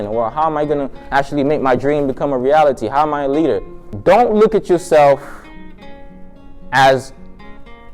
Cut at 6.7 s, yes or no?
no